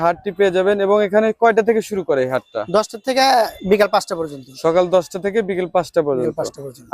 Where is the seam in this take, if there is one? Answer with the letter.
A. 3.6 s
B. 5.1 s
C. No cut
A